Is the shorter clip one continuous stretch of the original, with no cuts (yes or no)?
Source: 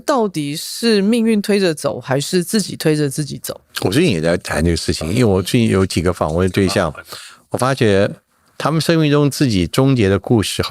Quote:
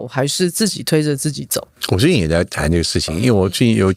yes